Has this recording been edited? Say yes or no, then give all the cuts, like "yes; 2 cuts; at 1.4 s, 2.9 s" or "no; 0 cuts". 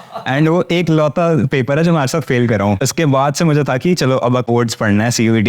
yes; 2 cuts; at 2.8 s, 4.5 s